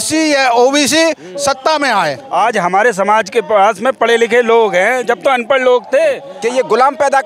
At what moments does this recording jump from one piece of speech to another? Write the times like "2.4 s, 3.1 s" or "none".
2.2 s, 6.3 s